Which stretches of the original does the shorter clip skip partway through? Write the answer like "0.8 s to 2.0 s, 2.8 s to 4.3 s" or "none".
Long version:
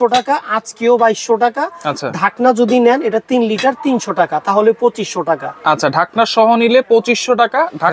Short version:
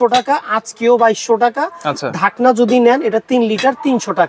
none